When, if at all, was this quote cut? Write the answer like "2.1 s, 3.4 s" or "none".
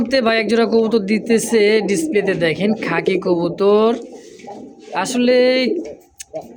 none